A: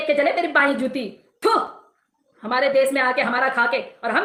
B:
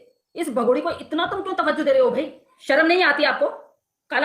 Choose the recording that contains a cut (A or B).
B